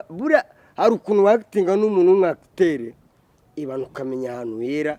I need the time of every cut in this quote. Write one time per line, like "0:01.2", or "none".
none